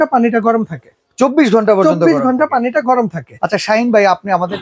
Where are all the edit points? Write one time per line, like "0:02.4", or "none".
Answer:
none